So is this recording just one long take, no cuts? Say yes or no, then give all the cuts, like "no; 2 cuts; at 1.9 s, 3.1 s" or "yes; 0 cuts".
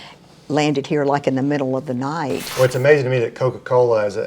no; 1 cut; at 2.4 s